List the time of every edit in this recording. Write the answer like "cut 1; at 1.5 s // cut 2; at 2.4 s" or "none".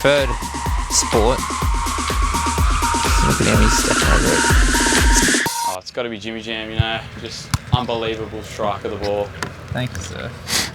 cut 1; at 5.3 s